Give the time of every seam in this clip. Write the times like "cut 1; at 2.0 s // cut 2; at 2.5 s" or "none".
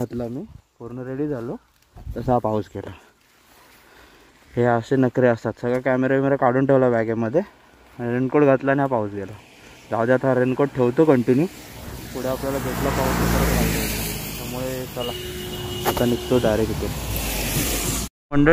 none